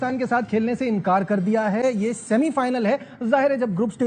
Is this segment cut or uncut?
uncut